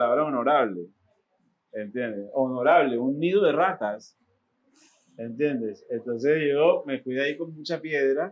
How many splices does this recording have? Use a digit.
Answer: 0